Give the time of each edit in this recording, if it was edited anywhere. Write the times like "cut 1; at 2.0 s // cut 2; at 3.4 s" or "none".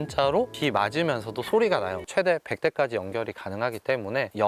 cut 1; at 2.0 s